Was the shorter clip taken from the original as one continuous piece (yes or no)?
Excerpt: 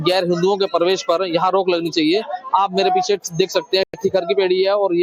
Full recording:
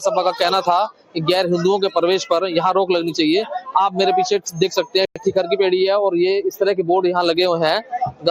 yes